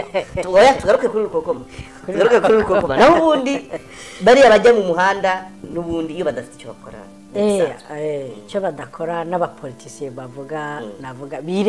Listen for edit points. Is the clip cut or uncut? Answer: uncut